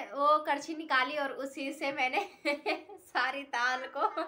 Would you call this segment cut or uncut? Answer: uncut